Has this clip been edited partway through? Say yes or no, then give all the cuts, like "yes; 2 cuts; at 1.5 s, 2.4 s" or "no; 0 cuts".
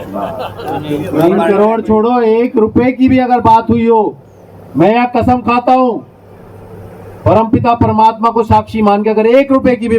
no; 0 cuts